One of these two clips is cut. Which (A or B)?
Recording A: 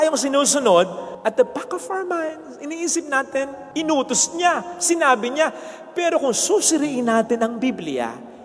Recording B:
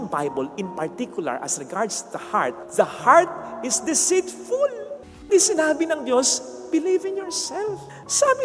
B